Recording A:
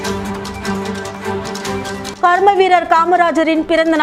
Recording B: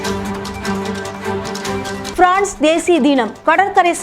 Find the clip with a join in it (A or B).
B